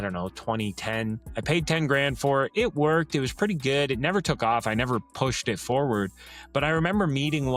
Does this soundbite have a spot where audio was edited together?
no; 0 cuts

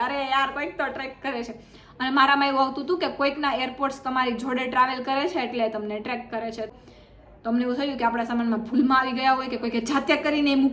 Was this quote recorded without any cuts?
yes; 0 cuts

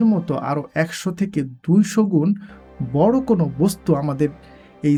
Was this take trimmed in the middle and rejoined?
no; 0 cuts

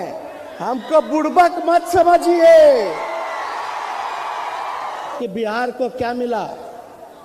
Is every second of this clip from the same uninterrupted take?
no; 1 cut; at 5.1 s

